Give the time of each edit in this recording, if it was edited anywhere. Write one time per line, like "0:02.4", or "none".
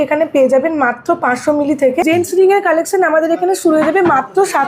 0:02.0